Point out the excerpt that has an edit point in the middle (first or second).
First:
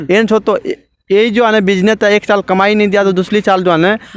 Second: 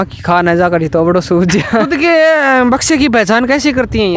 second